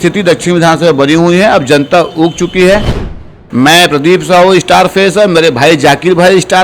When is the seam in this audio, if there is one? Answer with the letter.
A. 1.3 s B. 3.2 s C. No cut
B